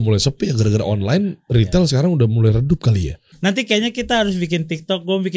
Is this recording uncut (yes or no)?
no